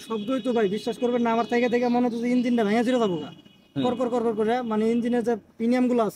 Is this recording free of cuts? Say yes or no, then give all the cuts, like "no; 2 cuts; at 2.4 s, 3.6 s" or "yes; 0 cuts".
yes; 0 cuts